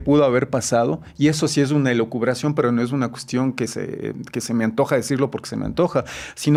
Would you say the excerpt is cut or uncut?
uncut